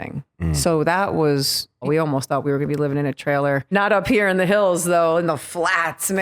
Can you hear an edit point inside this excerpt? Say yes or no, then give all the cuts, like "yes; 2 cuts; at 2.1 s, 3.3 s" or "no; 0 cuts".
yes; 2 cuts; at 1.8 s, 3.7 s